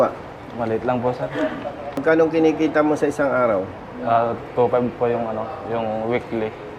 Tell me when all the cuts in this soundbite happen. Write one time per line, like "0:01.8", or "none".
0:02.0